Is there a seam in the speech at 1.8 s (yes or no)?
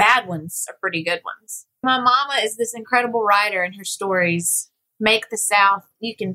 yes